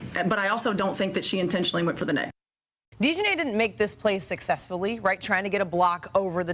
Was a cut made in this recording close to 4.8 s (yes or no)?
no